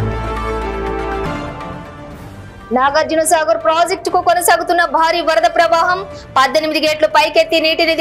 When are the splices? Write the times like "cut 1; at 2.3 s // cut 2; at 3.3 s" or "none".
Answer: none